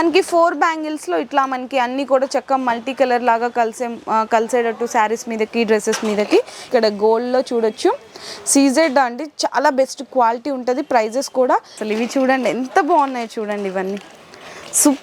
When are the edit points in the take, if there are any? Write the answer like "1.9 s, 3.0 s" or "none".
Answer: 6.7 s, 11.8 s